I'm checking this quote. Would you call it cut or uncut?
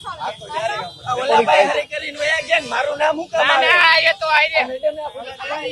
cut